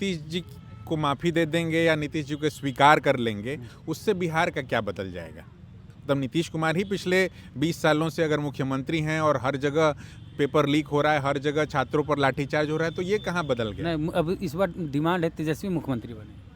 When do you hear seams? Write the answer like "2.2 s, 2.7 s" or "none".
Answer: none